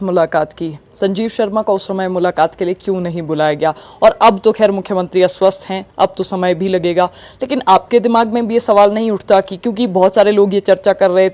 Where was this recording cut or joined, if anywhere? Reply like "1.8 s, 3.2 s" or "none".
none